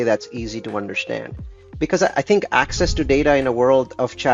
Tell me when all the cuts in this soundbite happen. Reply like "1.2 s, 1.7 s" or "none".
1.6 s